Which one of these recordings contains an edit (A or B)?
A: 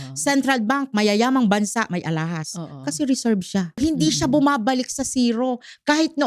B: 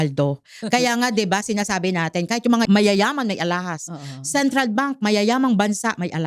B